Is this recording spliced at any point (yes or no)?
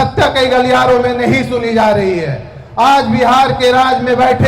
no